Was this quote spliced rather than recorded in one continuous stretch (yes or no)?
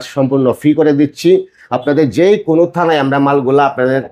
no